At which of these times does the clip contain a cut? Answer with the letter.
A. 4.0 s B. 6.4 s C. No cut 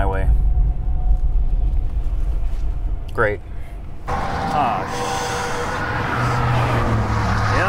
A